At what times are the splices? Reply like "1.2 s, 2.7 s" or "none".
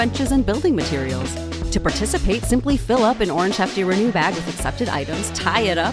none